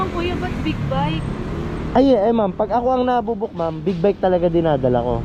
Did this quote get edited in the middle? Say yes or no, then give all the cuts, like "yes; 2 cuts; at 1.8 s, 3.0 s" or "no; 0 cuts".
no; 0 cuts